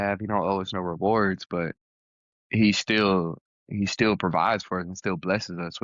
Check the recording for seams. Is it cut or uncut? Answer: uncut